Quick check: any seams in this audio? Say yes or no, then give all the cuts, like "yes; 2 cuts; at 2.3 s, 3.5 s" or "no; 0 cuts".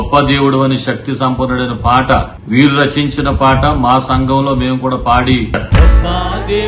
yes; 1 cut; at 5.6 s